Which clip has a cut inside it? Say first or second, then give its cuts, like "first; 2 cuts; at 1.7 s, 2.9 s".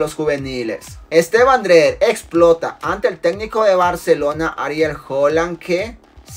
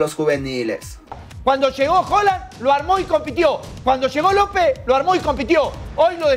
second; 1 cut; at 1.1 s